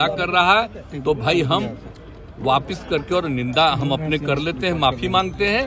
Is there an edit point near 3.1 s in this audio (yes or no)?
no